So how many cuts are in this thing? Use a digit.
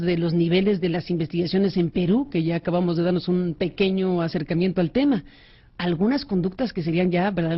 1